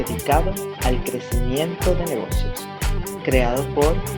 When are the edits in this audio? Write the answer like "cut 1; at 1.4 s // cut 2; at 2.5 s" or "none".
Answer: none